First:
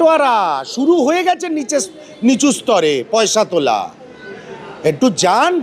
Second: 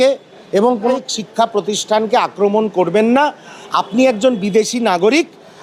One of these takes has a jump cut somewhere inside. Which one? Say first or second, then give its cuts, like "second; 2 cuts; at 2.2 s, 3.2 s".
second; 1 cut; at 0.9 s